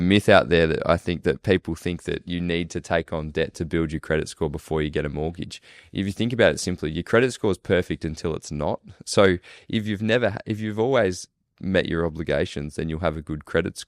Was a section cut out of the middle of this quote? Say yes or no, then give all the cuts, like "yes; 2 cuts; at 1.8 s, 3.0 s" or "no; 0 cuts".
no; 0 cuts